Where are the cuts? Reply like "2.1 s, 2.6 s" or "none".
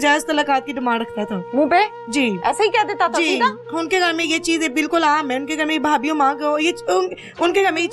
none